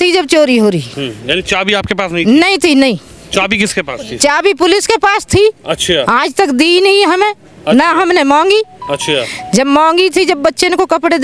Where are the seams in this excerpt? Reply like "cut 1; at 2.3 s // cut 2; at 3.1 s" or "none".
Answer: none